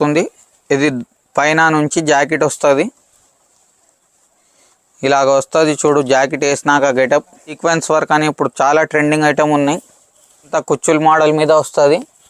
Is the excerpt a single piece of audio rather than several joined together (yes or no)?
no